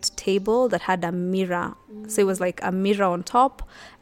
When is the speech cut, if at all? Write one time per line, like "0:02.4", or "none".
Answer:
none